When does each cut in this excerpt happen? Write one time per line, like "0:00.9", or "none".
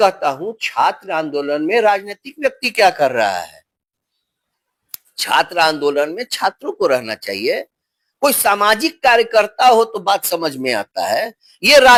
none